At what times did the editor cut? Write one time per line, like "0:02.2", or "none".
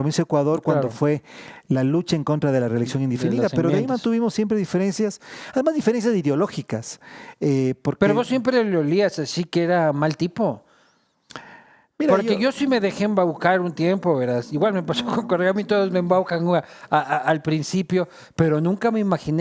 none